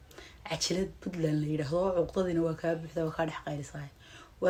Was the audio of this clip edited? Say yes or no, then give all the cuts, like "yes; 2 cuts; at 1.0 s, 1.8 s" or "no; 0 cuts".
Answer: no; 0 cuts